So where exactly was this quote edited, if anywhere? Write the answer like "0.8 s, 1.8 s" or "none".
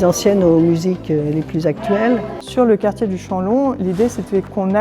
2.4 s